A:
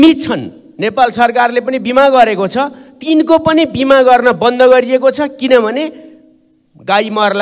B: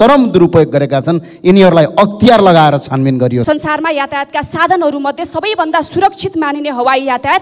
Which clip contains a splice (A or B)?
B